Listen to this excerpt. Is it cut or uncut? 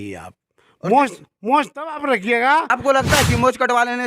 cut